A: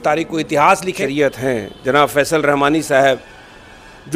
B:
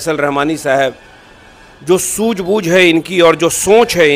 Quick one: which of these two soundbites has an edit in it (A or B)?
A